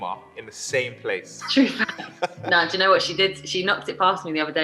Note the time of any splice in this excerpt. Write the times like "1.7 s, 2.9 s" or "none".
1.3 s, 2.4 s